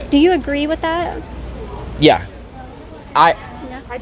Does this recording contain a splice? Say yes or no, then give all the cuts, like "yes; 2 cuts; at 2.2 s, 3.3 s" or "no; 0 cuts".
yes; 1 cut; at 1.3 s